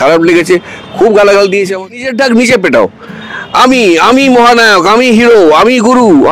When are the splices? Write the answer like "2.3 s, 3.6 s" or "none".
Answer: 1.9 s